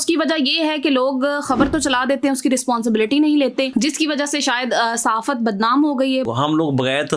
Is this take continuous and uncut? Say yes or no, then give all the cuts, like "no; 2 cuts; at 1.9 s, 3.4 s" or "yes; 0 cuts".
no; 2 cuts; at 3.7 s, 6.3 s